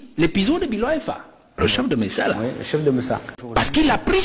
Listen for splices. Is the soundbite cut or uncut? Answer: cut